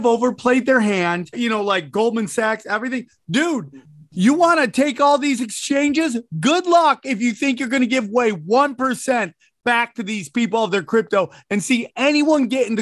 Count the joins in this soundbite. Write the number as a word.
one